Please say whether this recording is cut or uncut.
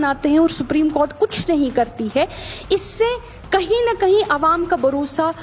uncut